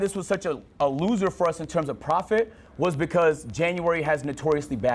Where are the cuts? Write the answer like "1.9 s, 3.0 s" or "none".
none